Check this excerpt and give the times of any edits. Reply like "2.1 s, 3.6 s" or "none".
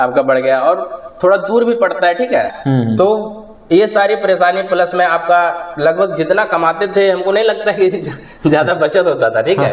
2.5 s